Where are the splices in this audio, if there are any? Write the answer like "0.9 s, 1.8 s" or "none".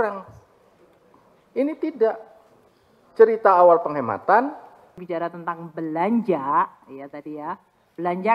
5.0 s